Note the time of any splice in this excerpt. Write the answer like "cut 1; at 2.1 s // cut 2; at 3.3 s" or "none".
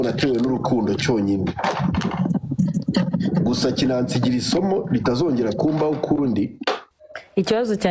cut 1; at 6.9 s